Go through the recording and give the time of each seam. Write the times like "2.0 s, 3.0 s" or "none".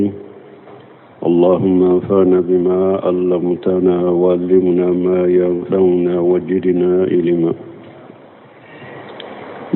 5.5 s

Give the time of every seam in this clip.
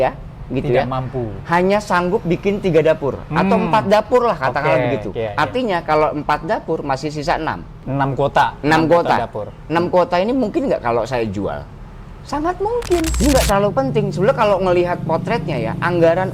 13.2 s

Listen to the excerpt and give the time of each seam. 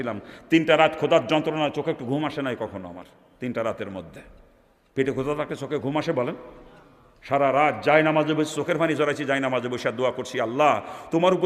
none

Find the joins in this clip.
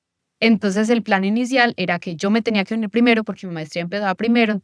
none

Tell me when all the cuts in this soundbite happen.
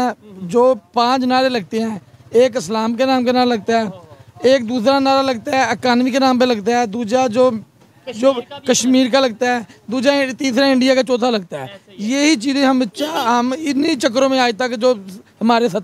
none

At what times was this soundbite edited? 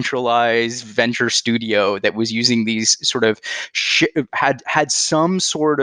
none

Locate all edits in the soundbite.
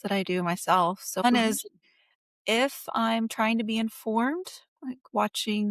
1.2 s

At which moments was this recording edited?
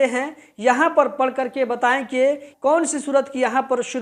2.5 s

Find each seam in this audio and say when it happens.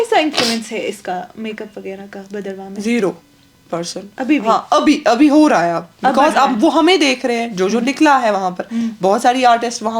none

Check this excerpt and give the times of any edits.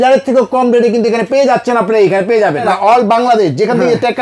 2.7 s

